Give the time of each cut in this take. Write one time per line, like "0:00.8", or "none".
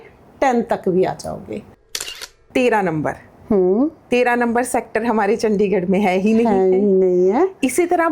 0:02.3